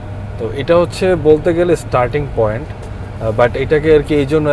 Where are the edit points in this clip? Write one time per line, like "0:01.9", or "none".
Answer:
none